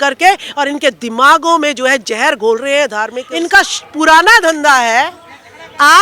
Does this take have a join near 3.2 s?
yes; 1 cut; at 3.2 s

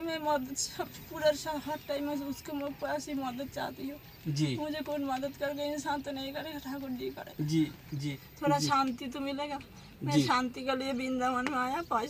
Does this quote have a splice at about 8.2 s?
yes; 1 cut; at 8.2 s

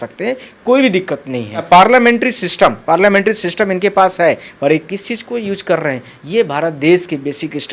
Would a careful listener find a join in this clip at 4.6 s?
no; 1 cut; at 1.6 s

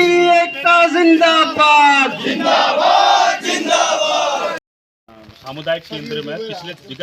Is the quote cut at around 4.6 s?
yes; 1 cut; at 4.6 s

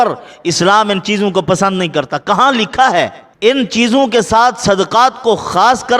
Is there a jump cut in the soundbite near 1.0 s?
no; 1 cut; at 3.2 s

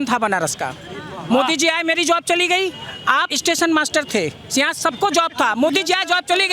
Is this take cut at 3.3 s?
yes; 1 cut; at 3.3 s

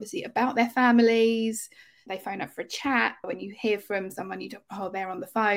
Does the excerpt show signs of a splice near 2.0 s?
yes; 2 cuts; at 2.0 s, 3.3 s

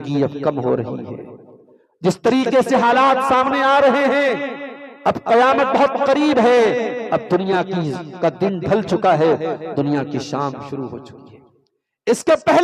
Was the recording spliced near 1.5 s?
no; 0 cuts

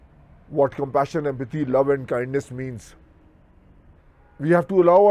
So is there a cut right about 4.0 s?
yes; 1 cut; at 4.0 s

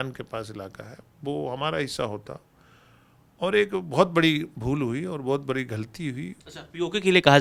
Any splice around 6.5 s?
no; 0 cuts

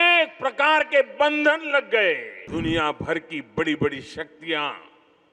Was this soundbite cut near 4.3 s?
no; 1 cut; at 2.4 s

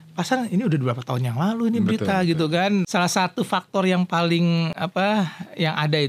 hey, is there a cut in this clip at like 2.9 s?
yes; 1 cut; at 2.9 s

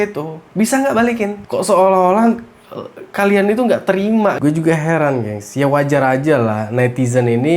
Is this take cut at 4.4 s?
yes; 1 cut; at 4.4 s

